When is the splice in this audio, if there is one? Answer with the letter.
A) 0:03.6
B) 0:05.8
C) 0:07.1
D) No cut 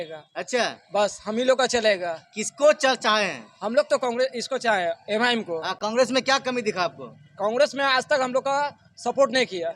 D